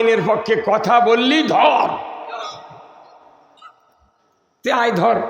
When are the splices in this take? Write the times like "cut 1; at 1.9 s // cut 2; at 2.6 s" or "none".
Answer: none